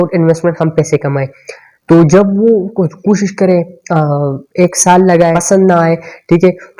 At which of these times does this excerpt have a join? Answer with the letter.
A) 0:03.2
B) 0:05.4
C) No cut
B